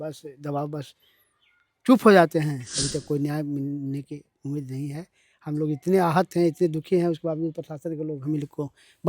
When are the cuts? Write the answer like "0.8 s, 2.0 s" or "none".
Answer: 2.7 s